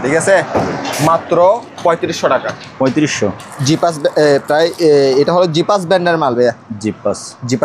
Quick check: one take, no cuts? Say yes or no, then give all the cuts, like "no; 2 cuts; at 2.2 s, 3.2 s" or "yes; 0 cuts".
yes; 0 cuts